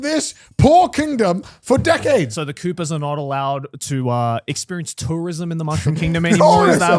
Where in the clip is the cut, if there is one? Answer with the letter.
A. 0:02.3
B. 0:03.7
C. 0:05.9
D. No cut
A